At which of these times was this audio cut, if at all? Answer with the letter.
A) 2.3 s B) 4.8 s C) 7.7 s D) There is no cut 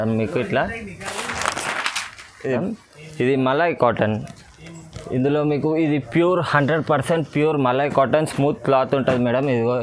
A